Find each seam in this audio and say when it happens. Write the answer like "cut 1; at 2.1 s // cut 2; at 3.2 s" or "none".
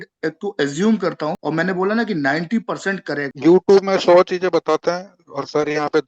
cut 1; at 1.4 s // cut 2; at 3.4 s